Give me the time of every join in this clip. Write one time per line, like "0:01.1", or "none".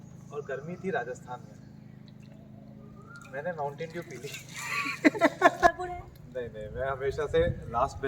0:05.7